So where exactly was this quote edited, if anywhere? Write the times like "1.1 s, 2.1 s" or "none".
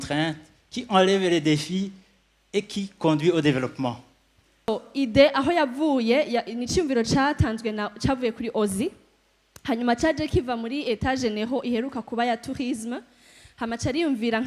4.7 s